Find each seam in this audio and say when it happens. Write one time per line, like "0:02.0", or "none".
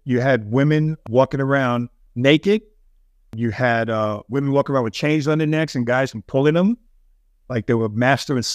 0:01.0
0:02.0
0:03.3